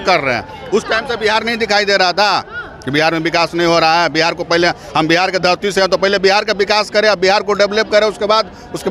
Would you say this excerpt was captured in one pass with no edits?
yes; 0 cuts

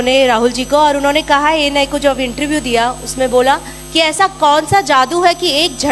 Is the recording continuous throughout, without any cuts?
yes; 0 cuts

